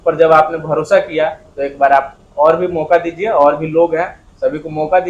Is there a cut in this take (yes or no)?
no